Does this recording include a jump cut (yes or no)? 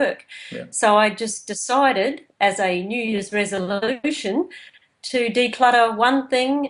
yes